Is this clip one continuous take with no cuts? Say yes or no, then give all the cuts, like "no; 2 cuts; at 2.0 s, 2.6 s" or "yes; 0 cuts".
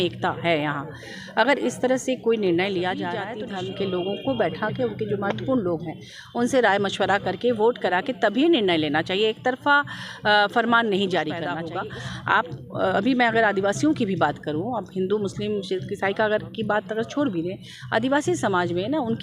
no; 2 cuts; at 3.3 s, 11.6 s